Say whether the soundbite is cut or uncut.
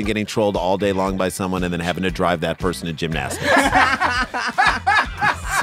uncut